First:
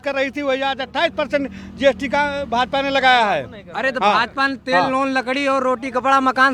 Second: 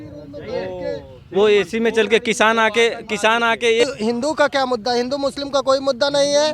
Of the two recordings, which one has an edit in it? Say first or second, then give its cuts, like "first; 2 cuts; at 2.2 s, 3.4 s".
second; 1 cut; at 3.9 s